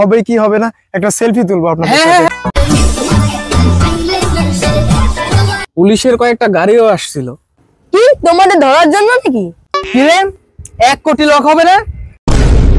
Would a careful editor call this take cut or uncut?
cut